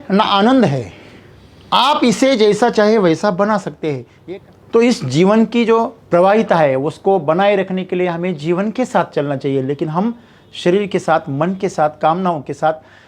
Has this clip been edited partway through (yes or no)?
yes